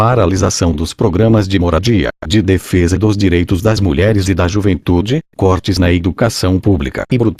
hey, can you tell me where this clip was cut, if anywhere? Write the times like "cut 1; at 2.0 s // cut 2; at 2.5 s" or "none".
none